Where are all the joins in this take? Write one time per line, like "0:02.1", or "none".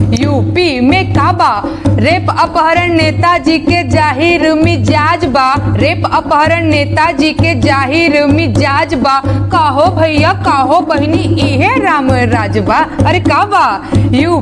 none